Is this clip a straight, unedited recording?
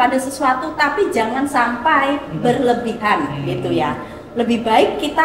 yes; 0 cuts

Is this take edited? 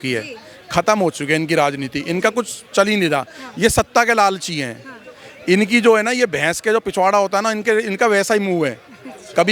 no; 0 cuts

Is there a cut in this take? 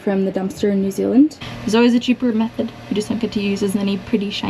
yes; 1 cut; at 1.4 s

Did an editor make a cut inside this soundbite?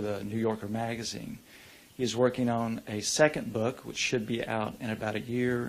no; 0 cuts

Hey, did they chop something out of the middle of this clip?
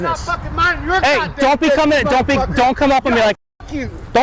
no; 0 cuts

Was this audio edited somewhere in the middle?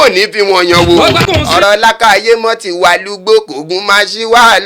yes; 1 cut; at 1.2 s

